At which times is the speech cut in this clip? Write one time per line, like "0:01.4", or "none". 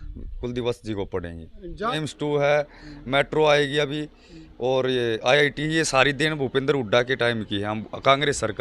0:01.9